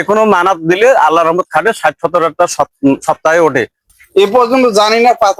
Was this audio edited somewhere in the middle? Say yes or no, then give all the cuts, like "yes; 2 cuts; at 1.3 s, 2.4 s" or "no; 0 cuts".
yes; 1 cut; at 3.8 s